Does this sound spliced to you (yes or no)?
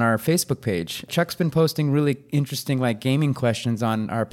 yes